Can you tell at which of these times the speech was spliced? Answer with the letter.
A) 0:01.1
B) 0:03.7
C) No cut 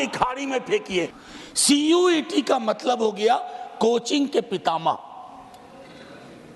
A